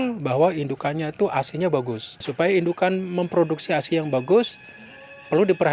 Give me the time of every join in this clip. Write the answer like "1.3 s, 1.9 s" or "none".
2.2 s